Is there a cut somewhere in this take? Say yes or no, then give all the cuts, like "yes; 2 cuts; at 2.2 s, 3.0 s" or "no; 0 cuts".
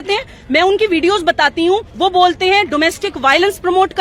yes; 1 cut; at 1.9 s